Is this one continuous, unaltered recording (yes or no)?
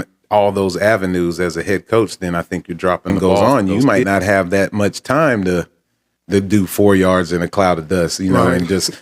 no